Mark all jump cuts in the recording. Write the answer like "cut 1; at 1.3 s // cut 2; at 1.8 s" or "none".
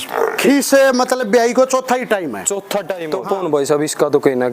cut 1; at 3.0 s